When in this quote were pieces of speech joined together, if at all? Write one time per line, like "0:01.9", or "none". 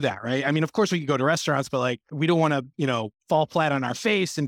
0:02.1
0:03.1